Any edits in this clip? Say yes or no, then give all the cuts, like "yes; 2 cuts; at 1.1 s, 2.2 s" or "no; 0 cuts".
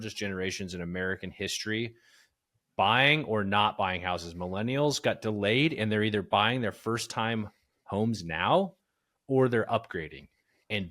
no; 0 cuts